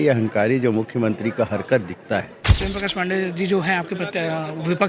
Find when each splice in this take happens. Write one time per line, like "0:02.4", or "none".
0:02.6